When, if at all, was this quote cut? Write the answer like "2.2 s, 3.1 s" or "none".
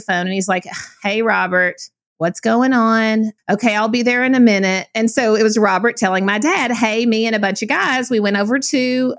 3.4 s